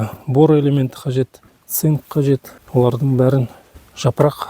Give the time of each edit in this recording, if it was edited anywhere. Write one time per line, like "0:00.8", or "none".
0:02.6